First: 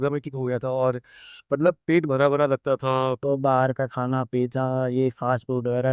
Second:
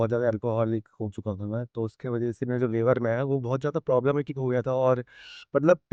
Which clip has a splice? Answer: first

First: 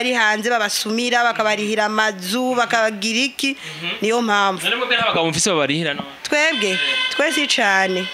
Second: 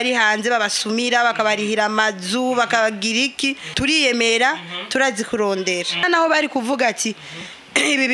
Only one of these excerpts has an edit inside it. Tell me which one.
second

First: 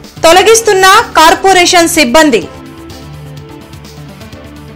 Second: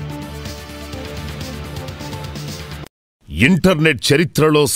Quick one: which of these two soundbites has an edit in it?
second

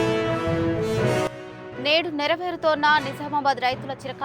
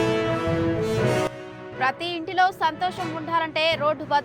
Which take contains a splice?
first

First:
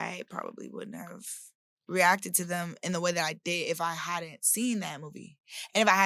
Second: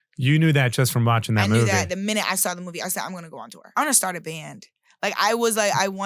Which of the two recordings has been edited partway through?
second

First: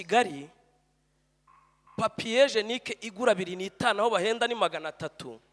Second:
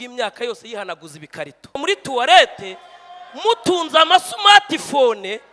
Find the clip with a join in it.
second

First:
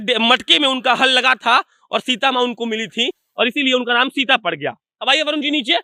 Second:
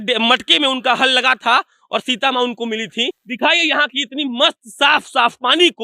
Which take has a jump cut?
second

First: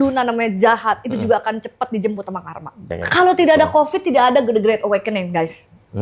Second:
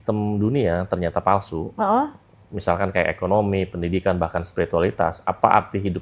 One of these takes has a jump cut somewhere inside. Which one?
first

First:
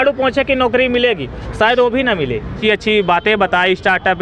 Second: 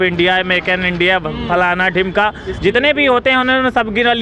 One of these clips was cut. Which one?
first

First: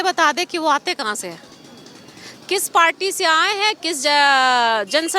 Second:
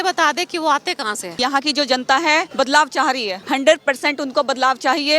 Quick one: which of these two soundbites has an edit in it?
second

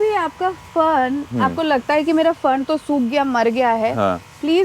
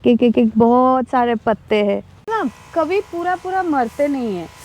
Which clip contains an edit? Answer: second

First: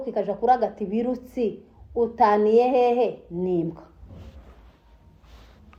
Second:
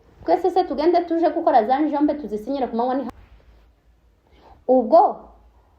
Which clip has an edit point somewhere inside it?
second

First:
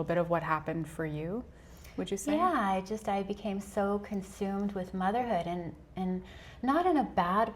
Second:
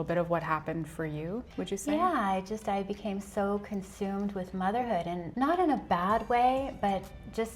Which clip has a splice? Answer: second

